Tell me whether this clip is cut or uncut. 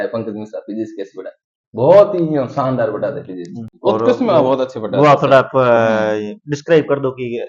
cut